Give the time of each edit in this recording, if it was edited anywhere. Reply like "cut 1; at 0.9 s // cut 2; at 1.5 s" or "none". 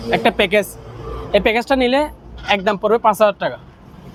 none